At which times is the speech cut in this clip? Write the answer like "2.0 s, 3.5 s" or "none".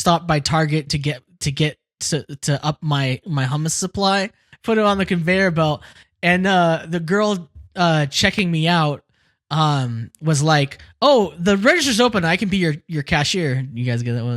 4.5 s